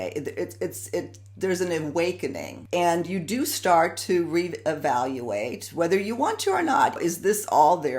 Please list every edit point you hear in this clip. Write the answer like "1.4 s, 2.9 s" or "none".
2.5 s, 7.0 s